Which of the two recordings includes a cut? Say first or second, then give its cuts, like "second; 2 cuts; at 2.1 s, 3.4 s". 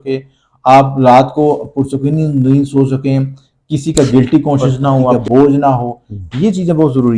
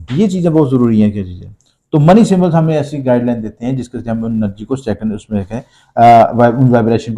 first; 1 cut; at 5.2 s